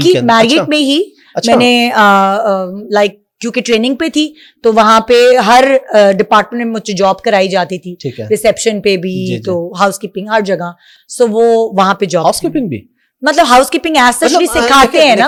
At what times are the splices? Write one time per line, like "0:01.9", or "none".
none